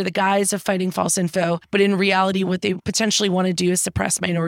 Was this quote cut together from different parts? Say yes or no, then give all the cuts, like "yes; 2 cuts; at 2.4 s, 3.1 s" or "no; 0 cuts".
yes; 2 cuts; at 1.6 s, 2.9 s